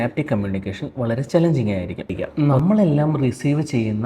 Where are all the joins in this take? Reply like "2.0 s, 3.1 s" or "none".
2.2 s